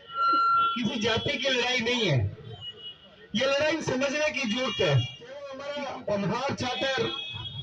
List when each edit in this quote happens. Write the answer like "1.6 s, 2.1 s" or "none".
5.6 s